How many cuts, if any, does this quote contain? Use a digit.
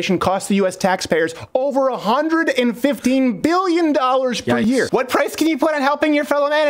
1